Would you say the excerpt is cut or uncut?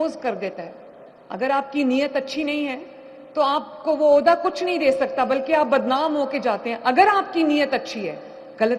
uncut